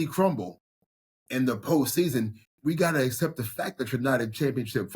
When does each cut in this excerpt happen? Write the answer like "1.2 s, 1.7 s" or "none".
2.4 s